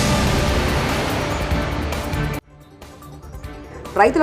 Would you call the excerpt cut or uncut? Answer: uncut